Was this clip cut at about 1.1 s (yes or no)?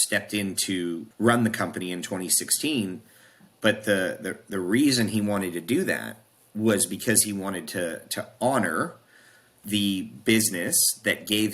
yes